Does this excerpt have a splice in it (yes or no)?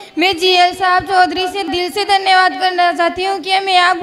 yes